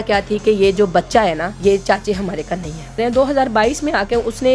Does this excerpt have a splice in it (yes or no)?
yes